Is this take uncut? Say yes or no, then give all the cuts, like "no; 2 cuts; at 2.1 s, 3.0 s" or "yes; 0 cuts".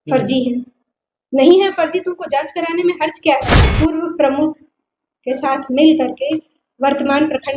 no; 1 cut; at 3.8 s